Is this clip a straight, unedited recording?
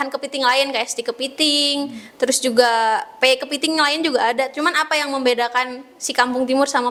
yes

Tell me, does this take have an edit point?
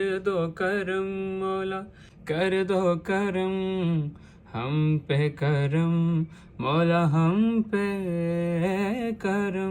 no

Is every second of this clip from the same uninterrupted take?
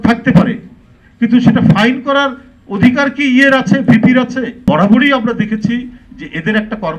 no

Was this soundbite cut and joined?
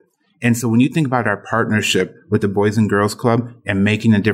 no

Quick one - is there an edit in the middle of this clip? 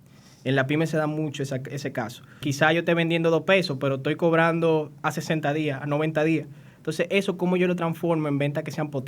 yes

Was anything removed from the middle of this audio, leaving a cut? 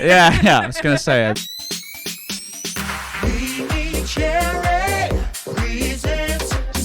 yes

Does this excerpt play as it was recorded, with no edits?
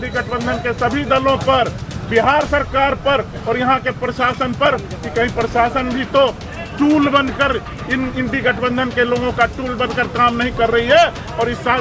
yes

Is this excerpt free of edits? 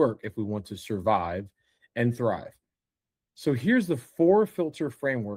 yes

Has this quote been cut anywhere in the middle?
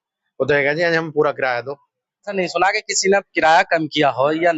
yes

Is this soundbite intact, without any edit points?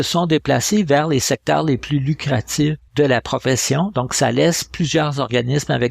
no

